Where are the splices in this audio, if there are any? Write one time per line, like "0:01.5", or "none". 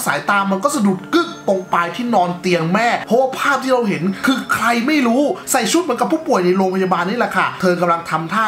0:03.0
0:05.4